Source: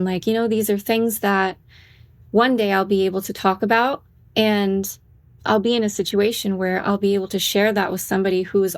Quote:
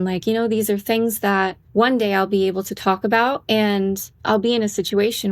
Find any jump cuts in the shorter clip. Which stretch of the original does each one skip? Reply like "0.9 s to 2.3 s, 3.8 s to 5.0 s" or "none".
1.6 s to 2.2 s, 4.0 s to 4.3 s, 5.0 s to 5.3 s